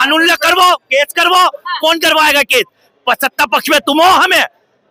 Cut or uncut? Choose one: uncut